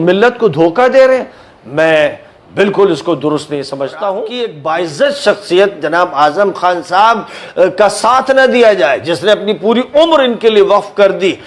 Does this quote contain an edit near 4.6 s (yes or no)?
yes